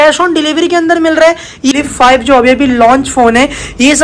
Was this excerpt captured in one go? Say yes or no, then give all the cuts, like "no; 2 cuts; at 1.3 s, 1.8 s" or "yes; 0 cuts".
no; 1 cut; at 1.8 s